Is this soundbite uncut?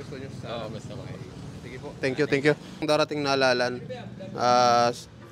no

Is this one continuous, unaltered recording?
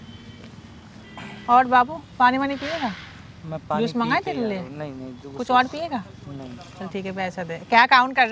yes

